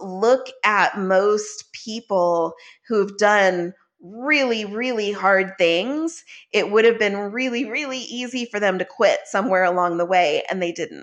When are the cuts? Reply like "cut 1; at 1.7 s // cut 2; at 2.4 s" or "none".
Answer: none